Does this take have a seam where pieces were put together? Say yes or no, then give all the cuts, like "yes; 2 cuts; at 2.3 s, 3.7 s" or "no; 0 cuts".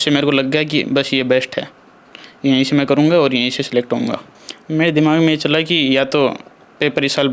yes; 1 cut; at 4.3 s